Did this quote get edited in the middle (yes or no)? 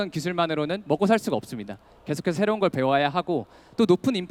no